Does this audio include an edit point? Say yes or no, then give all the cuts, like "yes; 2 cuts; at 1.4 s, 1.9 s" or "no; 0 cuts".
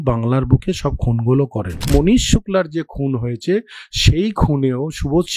yes; 1 cut; at 1.9 s